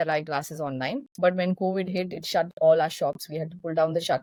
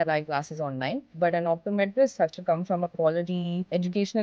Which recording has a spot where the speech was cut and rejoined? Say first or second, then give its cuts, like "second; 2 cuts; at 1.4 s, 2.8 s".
second; 1 cut; at 1.1 s